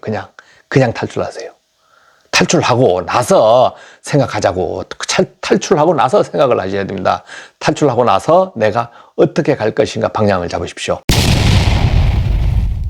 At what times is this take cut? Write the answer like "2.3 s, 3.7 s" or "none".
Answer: 11.0 s